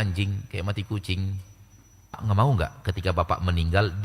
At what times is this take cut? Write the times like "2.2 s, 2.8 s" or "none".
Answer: 2.2 s